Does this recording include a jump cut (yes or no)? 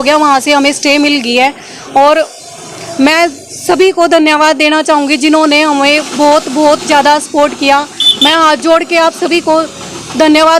no